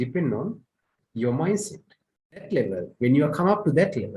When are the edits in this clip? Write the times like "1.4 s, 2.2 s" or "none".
2.5 s